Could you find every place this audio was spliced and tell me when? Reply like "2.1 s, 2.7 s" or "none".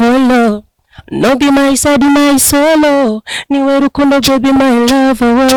none